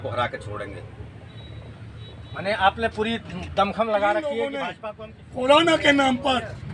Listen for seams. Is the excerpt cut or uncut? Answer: cut